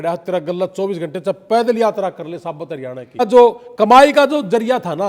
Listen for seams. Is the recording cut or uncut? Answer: cut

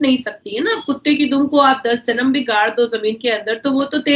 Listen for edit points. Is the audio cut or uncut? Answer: uncut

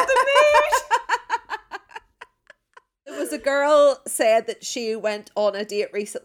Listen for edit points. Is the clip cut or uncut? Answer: cut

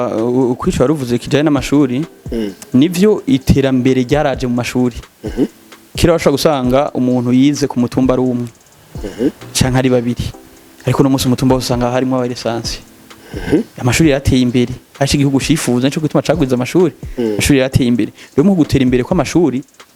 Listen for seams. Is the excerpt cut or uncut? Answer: uncut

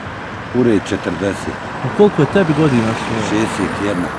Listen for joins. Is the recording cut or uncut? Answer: uncut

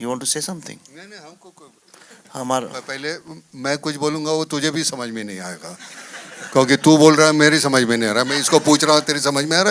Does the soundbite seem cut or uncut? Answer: uncut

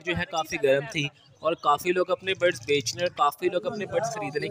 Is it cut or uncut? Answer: uncut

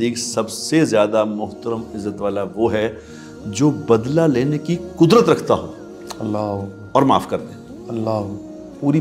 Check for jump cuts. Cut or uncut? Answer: uncut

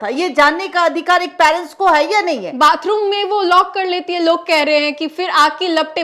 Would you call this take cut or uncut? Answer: uncut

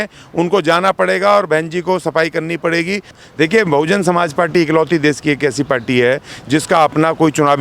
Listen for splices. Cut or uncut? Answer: cut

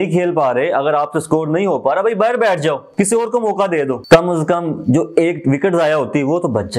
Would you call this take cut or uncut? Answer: uncut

